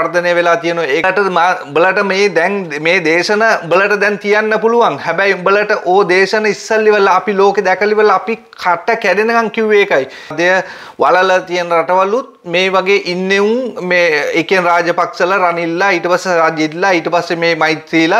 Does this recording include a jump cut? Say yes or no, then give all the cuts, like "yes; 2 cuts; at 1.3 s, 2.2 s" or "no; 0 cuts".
yes; 2 cuts; at 1.1 s, 10.3 s